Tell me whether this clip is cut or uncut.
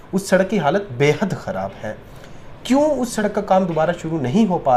uncut